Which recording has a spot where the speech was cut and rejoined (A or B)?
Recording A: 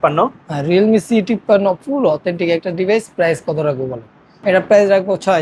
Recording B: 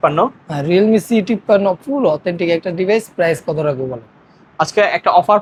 A